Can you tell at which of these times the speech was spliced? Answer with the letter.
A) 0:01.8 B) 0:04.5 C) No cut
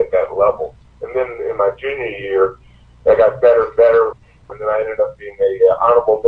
B